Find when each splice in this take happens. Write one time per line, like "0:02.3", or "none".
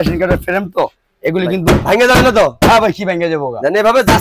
none

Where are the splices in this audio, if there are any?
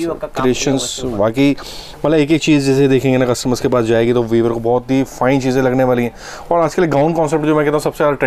none

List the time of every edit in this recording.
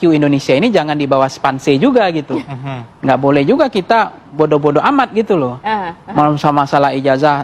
none

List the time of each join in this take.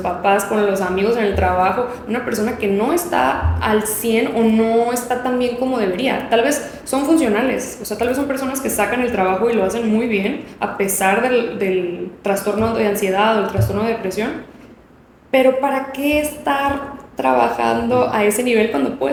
none

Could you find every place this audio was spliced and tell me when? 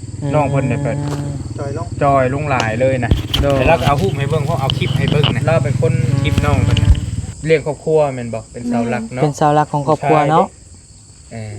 0:07.2

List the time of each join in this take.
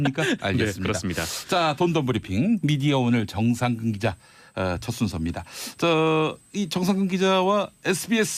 0:03.3

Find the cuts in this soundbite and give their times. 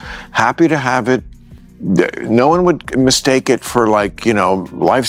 none

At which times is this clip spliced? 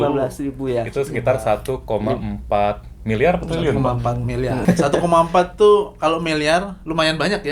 0:04.6

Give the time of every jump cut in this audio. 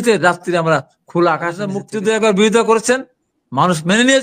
0:01.8

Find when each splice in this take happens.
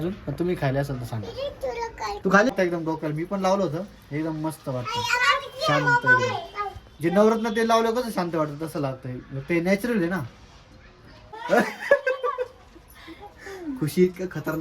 0:02.5
0:11.4

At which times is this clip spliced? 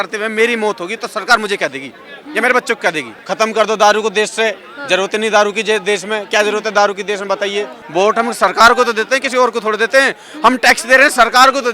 0:03.1
0:07.8

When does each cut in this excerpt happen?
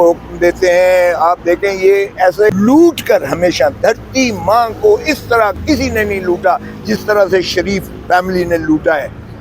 0:02.5

